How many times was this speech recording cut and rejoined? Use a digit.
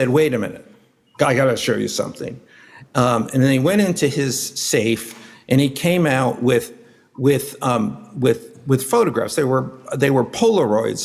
0